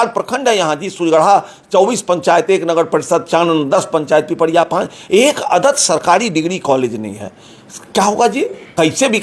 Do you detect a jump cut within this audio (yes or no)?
no